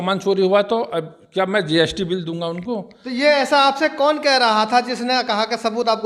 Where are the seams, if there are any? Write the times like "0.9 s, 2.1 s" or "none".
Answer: none

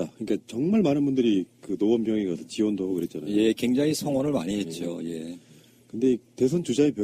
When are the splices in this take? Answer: 4.2 s

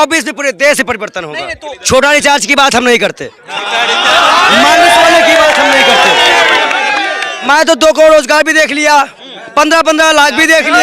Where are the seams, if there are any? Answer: 1.6 s, 7.3 s

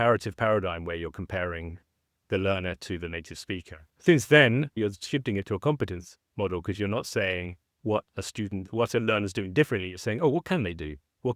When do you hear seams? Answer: 3.9 s, 4.8 s

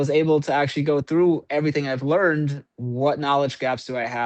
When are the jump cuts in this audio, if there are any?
2.7 s

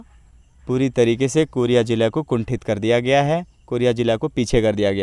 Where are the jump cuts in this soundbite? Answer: none

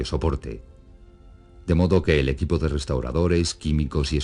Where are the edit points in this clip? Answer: 1.8 s

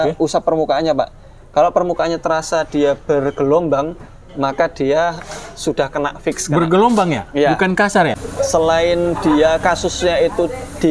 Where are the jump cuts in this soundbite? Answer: 8.2 s

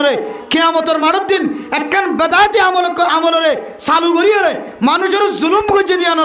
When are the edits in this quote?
none

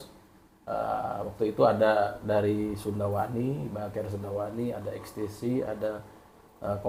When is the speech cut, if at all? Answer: none

